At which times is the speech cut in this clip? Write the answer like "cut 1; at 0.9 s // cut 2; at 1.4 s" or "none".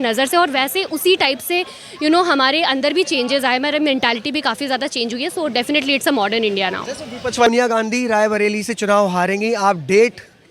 cut 1; at 7.5 s